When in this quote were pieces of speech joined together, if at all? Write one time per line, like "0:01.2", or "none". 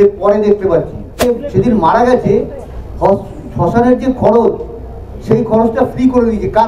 0:01.2

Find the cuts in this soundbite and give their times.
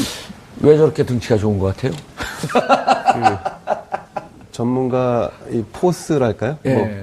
0:05.9

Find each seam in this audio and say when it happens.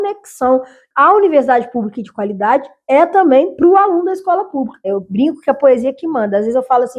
0:04.9

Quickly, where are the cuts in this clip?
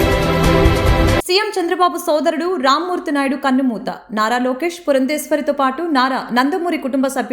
none

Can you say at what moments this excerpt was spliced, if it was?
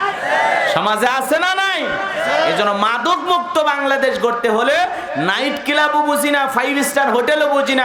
none

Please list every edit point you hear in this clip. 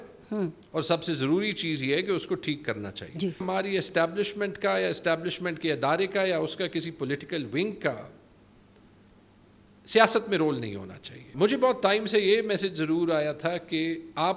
0:03.4
0:11.2

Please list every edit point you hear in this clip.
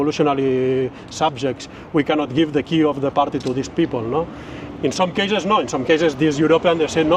none

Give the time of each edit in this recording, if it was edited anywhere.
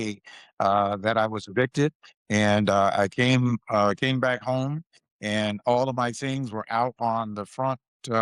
none

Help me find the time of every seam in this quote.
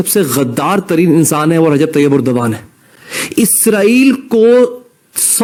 none

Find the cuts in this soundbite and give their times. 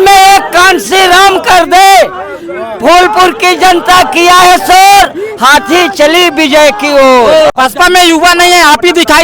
0:07.5

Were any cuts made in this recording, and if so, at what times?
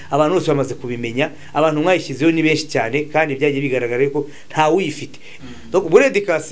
0:05.2

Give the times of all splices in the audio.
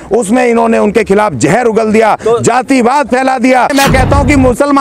0:03.7

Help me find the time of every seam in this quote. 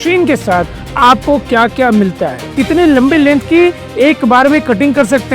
0:02.5

